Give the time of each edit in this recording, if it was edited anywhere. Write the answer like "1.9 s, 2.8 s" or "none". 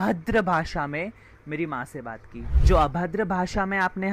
2.5 s